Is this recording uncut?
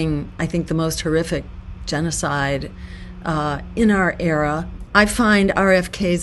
no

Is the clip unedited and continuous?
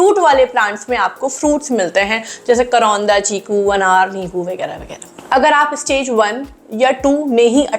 yes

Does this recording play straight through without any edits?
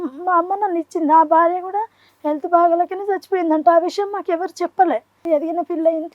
no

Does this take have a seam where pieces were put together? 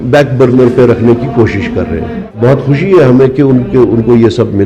yes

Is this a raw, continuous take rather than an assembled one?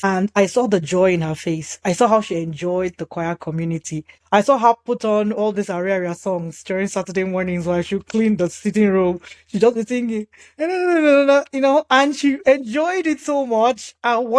no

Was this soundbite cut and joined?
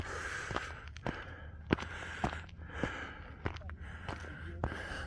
yes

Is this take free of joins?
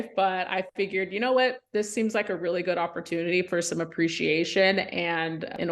yes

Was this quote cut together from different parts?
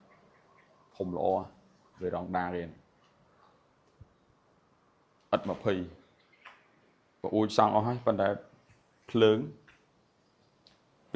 no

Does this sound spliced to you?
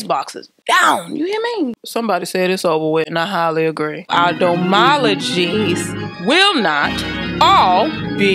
yes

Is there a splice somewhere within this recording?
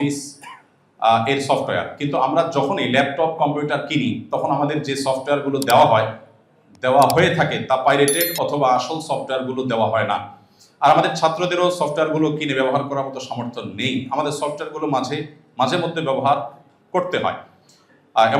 no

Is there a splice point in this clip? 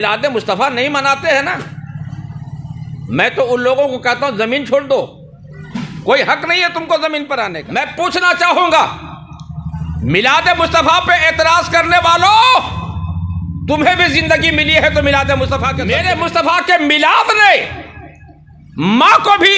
yes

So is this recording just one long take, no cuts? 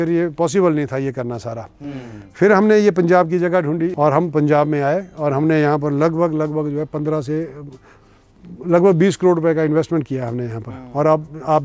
no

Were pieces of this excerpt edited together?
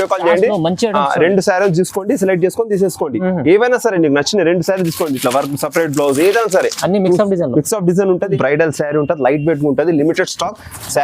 yes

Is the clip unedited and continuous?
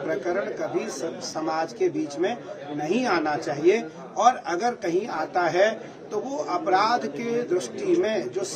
yes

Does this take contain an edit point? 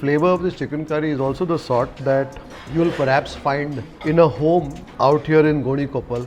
yes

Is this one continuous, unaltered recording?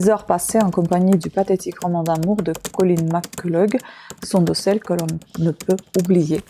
yes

